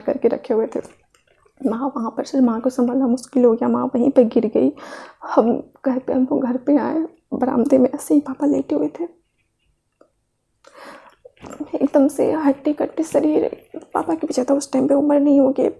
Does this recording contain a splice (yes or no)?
no